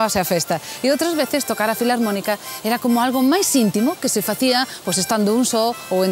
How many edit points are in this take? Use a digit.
1